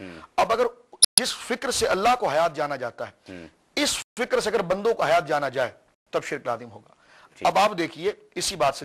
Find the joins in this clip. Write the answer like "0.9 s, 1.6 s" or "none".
none